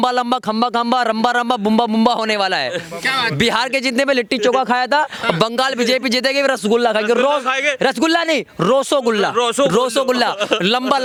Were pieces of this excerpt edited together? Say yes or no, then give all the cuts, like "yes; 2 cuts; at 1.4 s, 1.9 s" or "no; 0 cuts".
no; 0 cuts